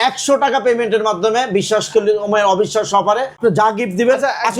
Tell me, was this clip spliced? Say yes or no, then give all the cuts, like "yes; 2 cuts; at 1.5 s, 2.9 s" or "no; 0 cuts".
yes; 1 cut; at 3.4 s